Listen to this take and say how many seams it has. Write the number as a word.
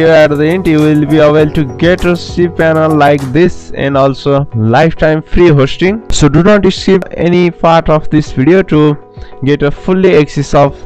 one